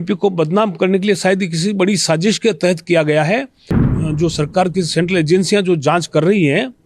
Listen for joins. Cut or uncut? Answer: cut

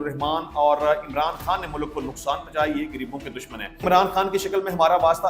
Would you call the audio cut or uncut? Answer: cut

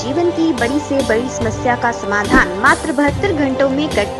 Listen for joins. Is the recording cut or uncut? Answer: uncut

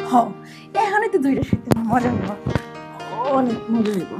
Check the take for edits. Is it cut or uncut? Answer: uncut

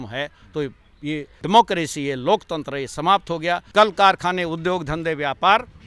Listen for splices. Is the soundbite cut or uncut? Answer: cut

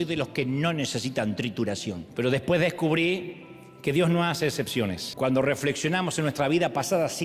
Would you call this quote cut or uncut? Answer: cut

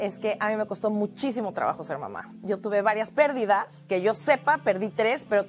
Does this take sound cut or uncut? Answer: cut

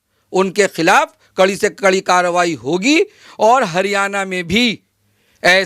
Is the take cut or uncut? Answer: cut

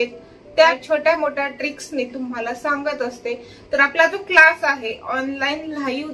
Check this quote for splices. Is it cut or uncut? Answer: cut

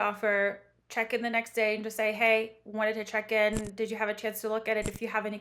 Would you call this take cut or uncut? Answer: uncut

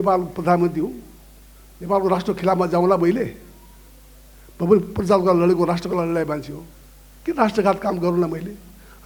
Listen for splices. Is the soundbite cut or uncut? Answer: uncut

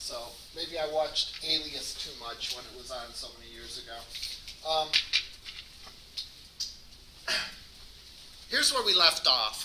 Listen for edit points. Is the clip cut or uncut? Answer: cut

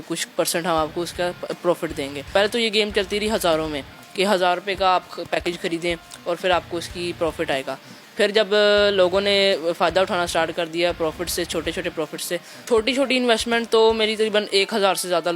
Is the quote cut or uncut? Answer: cut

